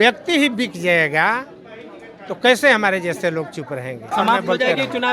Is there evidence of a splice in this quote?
yes; 1 cut; at 4.1 s

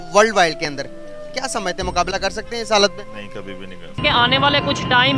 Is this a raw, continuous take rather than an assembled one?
no; 1 cut; at 3.8 s

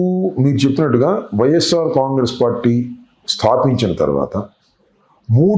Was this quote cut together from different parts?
no; 0 cuts

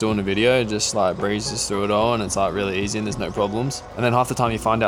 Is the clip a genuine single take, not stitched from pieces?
yes; 0 cuts

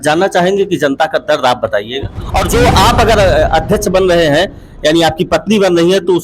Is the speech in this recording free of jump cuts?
no; 1 cut; at 2.5 s

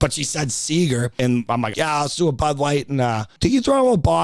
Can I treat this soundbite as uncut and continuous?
no; 2 cuts; at 1.6 s, 3.3 s

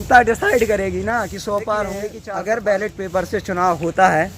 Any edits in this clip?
yes; 1 cut; at 2.1 s

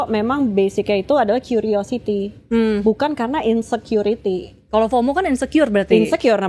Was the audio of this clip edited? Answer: no; 0 cuts

